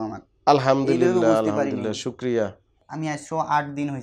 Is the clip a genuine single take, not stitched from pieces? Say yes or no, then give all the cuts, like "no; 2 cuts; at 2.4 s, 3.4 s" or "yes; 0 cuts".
no; 1 cut; at 2.8 s